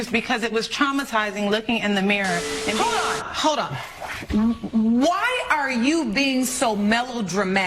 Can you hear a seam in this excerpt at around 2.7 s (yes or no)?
yes